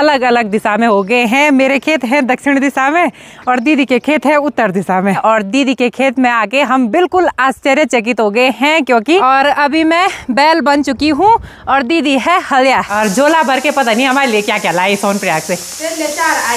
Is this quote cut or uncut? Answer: cut